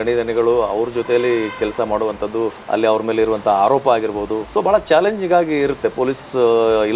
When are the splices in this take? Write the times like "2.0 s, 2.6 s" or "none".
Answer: 2.6 s, 4.4 s